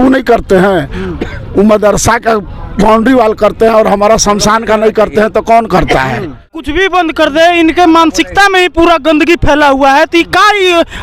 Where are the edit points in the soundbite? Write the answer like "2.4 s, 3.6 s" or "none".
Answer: 6.7 s